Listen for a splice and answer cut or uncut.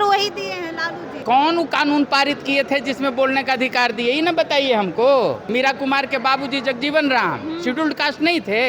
cut